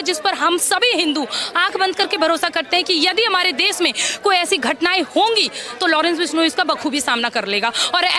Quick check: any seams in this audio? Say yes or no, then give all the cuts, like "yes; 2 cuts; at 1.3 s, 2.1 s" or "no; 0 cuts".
no; 0 cuts